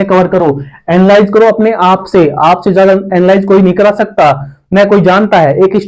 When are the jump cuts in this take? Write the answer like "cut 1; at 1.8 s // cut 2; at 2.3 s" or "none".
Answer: none